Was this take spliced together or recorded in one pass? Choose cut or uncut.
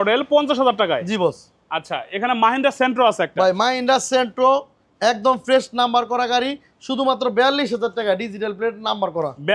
uncut